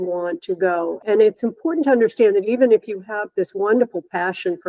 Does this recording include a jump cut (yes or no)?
yes